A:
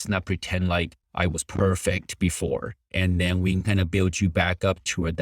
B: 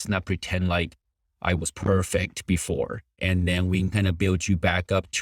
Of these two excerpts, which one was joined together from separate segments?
A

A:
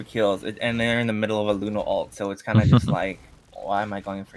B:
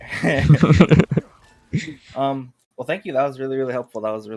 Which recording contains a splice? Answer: B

